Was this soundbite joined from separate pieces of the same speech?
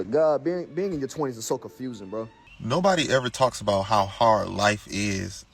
yes; 1 cut; at 2.4 s

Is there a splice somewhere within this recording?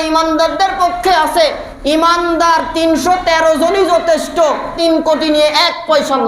yes; 1 cut; at 4.7 s

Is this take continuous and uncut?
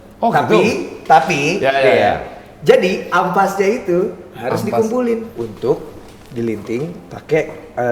no; 1 cut; at 5.3 s

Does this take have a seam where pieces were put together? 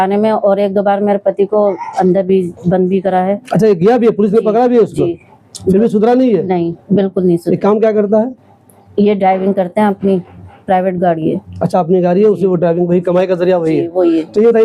no; 0 cuts

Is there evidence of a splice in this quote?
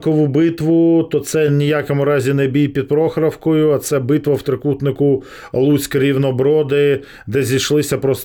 no; 0 cuts

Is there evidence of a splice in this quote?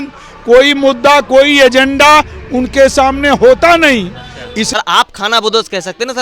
yes; 1 cut; at 4.6 s

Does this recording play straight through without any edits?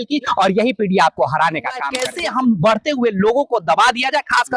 no; 1 cut; at 2.0 s

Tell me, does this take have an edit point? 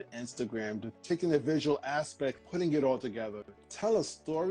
yes; 2 cuts; at 0.9 s, 2.4 s

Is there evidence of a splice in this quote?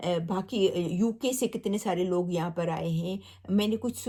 no; 0 cuts

